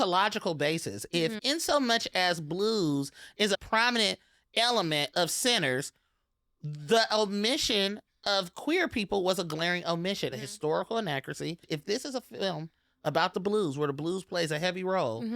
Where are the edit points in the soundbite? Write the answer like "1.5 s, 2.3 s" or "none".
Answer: 3.6 s, 10.3 s, 11.6 s